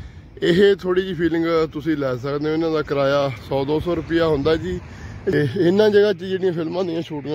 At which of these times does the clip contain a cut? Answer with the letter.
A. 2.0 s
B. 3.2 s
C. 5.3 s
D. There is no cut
C